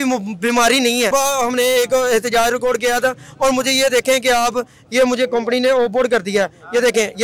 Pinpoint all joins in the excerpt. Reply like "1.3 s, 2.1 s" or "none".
1.1 s